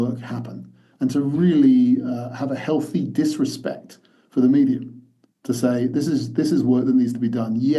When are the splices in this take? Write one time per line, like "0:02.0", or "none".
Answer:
none